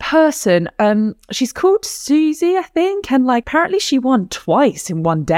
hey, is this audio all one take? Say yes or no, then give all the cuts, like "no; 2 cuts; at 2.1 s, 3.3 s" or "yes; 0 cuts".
no; 1 cut; at 3.5 s